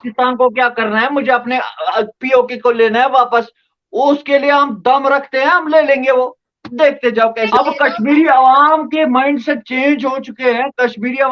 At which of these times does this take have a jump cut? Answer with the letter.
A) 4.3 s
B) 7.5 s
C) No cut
B